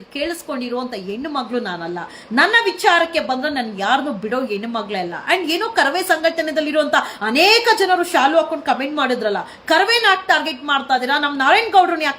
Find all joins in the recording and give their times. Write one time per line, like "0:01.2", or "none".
none